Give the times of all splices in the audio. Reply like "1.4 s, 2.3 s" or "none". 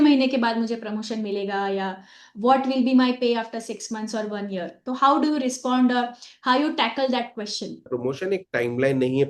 4.8 s, 7.9 s